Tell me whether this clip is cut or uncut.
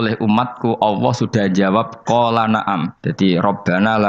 cut